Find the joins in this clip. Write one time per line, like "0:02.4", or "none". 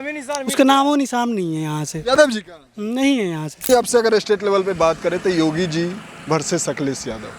0:03.6

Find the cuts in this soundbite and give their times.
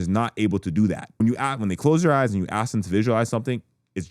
0:01.1

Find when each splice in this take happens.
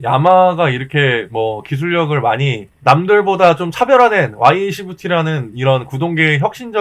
none

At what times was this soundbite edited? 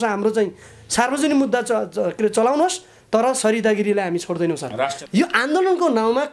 0:05.0

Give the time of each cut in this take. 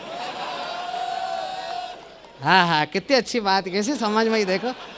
none

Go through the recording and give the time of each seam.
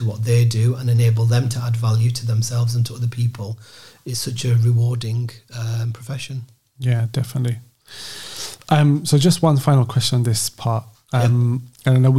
none

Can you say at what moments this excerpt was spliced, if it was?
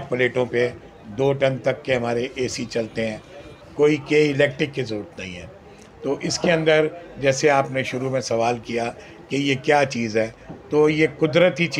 0:03.5

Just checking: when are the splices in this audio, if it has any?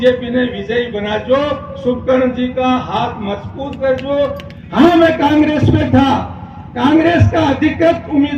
0:04.5

